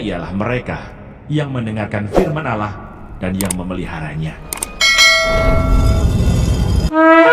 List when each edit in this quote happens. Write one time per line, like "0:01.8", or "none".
none

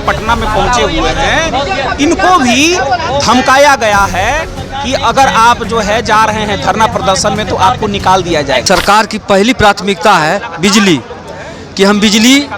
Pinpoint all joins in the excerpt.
0:08.6

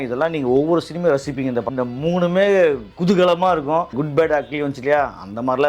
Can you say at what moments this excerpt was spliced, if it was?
0:01.7

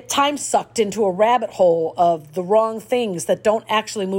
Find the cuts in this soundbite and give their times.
none

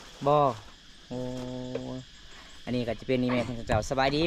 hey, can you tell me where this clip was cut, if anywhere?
none

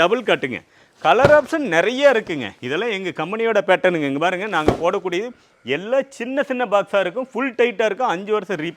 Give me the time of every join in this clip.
none

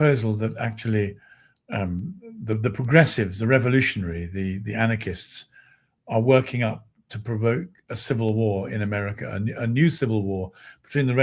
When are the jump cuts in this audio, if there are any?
none

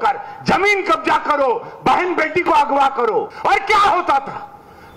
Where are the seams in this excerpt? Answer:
0:03.3

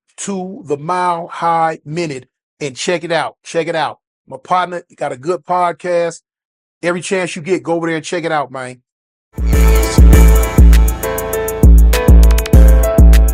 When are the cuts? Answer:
0:09.5

